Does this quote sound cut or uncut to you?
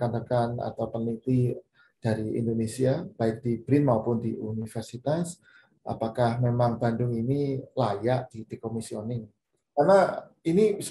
cut